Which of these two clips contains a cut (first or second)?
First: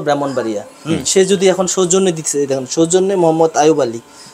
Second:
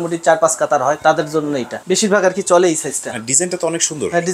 second